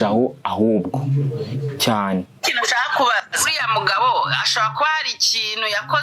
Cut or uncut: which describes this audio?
uncut